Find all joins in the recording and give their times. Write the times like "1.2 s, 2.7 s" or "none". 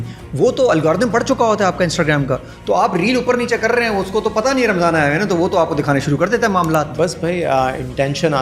none